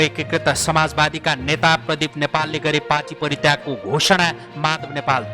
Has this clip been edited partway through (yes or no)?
no